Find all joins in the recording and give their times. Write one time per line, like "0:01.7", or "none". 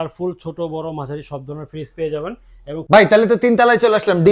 0:02.8